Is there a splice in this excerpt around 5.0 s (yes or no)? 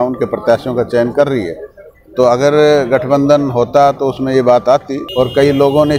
yes